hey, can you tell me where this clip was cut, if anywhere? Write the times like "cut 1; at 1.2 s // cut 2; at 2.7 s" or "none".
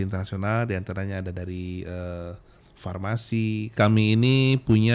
cut 1; at 3.7 s